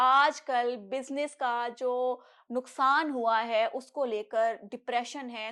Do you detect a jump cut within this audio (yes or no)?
no